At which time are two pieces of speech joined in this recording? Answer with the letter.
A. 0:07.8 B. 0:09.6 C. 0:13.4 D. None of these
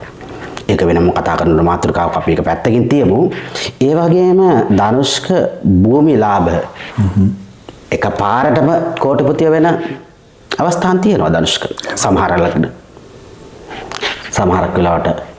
D